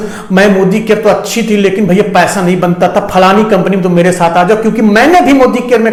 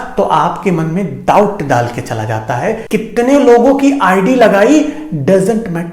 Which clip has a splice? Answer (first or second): second